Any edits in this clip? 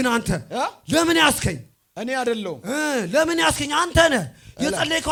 no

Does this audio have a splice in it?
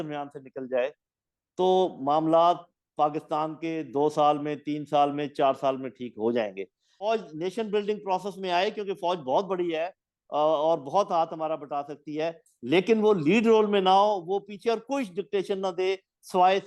yes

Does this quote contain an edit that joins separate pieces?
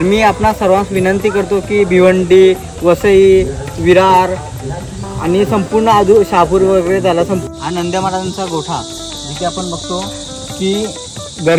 yes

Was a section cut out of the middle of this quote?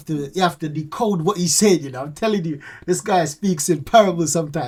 no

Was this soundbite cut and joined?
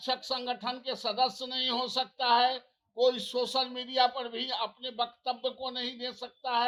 no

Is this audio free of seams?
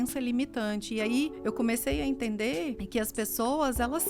no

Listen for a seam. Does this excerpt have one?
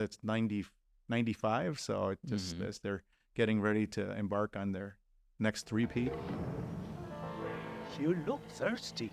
yes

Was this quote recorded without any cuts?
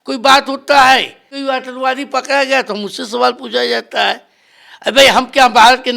no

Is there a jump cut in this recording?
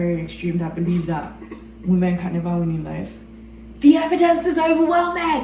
no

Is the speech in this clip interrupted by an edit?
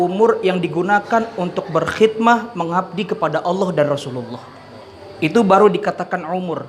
no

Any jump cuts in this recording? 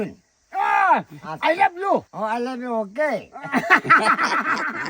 yes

